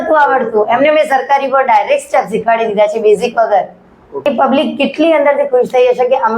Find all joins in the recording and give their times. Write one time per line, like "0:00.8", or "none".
0:04.3